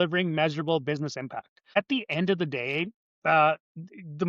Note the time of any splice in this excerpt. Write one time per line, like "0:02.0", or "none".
0:01.8